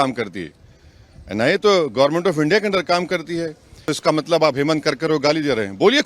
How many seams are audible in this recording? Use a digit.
1